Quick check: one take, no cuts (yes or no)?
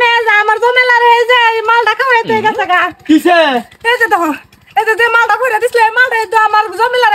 yes